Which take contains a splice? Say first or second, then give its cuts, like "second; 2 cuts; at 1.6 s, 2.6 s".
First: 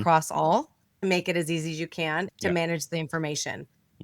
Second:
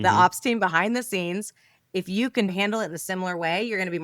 first; 1 cut; at 1.0 s